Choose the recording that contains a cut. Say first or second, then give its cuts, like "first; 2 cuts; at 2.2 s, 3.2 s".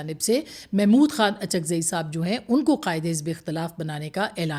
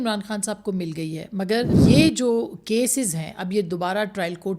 second; 1 cut; at 1.7 s